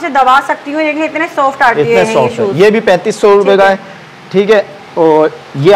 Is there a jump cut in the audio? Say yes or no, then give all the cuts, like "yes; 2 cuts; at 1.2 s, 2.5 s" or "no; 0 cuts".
no; 0 cuts